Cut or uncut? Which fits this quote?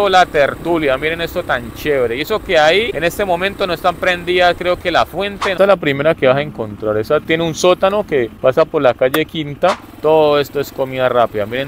cut